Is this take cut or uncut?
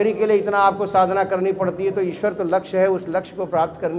uncut